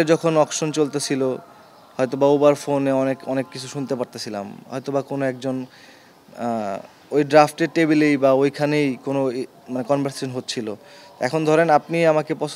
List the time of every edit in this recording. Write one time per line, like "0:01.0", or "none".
none